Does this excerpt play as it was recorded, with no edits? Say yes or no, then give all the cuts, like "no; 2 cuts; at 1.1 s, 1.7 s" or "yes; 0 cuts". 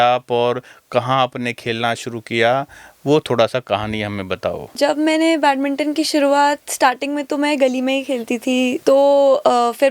no; 2 cuts; at 4.7 s, 8.8 s